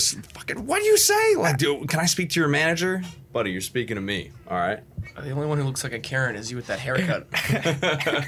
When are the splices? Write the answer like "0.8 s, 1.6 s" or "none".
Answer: none